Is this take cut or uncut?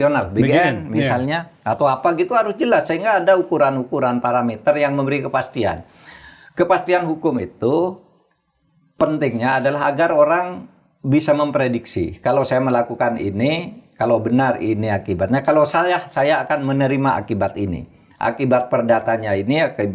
uncut